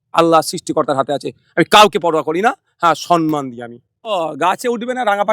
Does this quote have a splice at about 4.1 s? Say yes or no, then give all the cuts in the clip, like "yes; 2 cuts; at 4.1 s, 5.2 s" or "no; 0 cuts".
yes; 1 cut; at 4.1 s